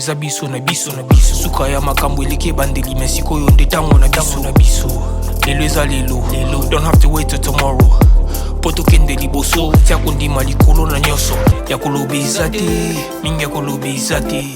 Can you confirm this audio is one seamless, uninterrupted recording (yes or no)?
no